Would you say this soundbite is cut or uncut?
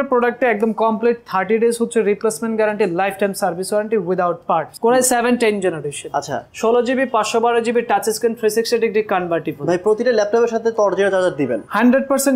cut